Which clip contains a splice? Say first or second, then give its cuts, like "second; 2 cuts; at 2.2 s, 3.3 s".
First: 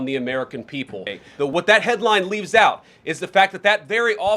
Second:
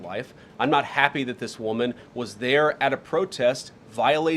first; 1 cut; at 1.5 s